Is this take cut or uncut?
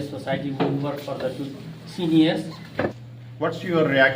cut